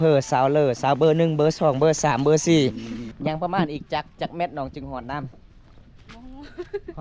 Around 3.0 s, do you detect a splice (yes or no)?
yes